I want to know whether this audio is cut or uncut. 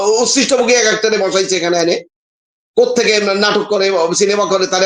uncut